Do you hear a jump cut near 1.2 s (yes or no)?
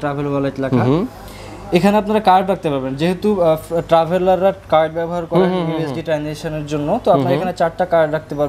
no